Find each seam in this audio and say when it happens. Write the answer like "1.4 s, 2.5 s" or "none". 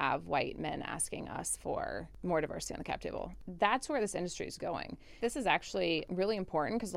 2.1 s, 3.4 s, 5.2 s, 6.0 s

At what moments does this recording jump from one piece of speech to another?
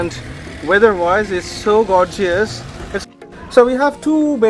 3.1 s

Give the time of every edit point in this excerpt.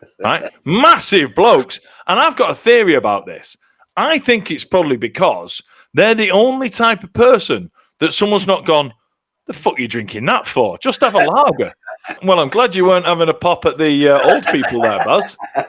12.1 s

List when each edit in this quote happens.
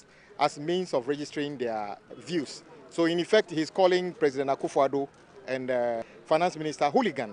2.1 s, 6.1 s

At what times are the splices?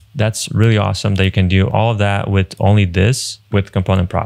1.7 s, 3.3 s

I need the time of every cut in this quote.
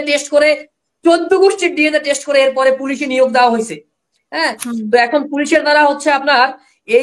none

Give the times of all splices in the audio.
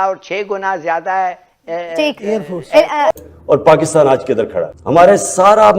3.2 s

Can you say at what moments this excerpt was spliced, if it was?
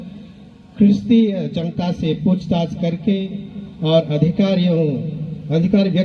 none

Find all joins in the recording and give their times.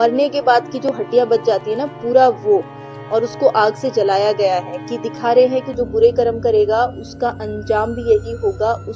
none

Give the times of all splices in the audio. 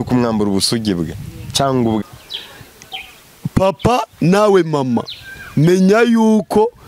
2.0 s

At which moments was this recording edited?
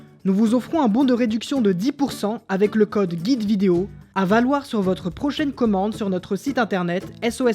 4.0 s

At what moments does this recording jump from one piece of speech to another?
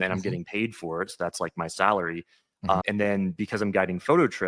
2.8 s

